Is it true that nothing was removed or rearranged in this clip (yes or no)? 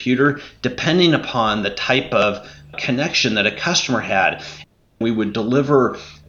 no